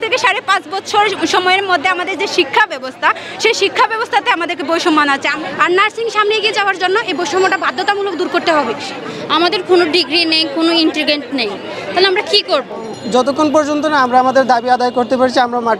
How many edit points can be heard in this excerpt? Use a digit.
3